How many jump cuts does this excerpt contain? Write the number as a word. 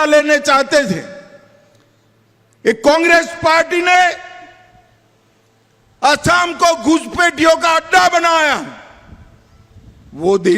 zero